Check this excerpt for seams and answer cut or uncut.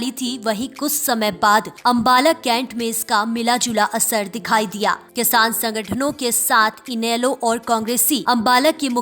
cut